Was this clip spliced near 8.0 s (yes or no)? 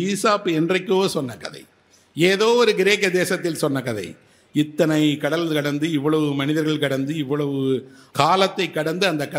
yes